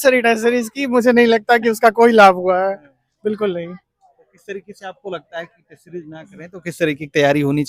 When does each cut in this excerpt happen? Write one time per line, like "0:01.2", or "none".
none